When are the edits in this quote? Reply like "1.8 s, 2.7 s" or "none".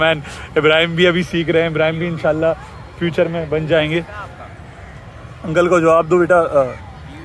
none